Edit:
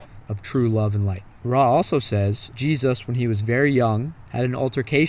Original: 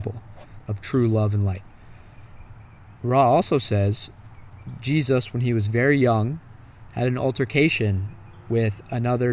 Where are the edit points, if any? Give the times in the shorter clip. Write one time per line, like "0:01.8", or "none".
0:01.3
0:02.5
0:04.2